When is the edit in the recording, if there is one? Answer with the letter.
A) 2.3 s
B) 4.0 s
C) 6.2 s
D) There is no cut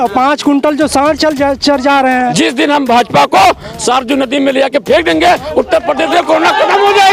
A